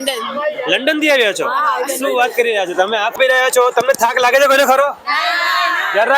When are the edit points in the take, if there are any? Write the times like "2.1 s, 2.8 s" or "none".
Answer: 3.2 s